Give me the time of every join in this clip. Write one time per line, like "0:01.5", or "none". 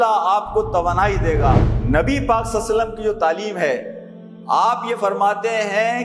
0:01.6